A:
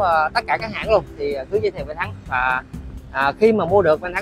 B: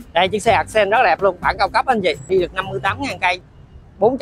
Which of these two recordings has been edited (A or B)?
B